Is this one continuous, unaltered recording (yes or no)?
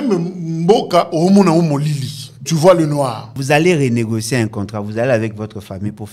no